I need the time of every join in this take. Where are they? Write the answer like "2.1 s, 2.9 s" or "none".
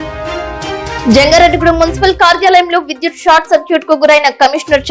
1.0 s